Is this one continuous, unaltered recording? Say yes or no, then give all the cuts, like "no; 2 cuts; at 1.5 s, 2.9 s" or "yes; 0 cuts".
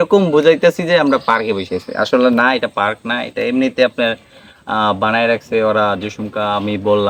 yes; 0 cuts